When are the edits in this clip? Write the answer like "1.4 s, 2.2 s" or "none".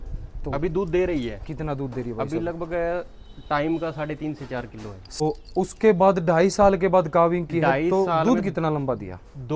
5.2 s